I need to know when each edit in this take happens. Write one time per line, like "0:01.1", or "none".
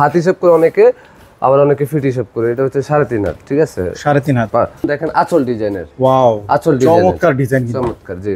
0:04.9